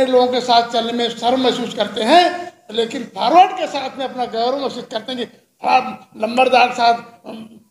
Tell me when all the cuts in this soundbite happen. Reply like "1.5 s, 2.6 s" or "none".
none